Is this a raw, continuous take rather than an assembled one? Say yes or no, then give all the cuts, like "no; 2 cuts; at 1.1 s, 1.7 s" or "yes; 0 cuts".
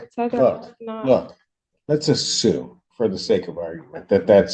yes; 0 cuts